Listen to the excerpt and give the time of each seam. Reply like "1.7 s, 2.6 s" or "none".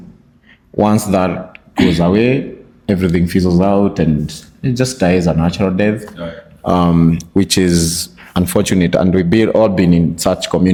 none

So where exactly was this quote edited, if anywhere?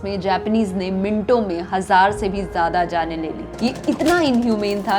3.4 s

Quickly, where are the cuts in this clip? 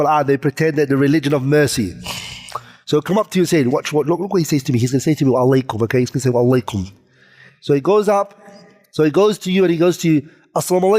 none

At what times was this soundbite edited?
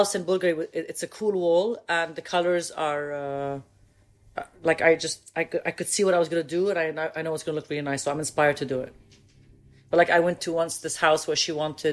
none

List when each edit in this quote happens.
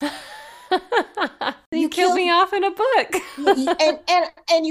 1.6 s

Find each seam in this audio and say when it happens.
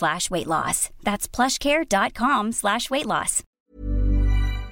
3.5 s

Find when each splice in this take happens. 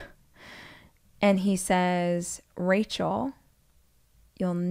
none

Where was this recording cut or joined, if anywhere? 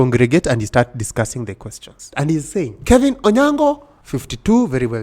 2.0 s, 2.7 s

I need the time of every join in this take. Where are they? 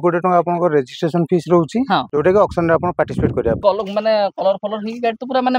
2.1 s, 3.6 s

